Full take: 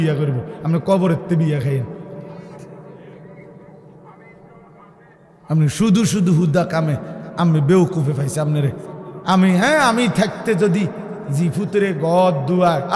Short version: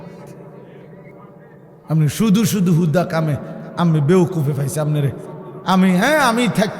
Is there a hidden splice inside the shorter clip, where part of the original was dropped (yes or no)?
yes